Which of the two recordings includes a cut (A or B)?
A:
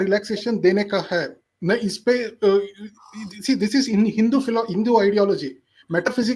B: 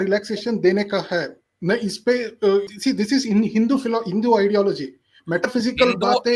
B